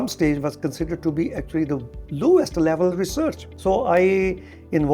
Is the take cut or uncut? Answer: cut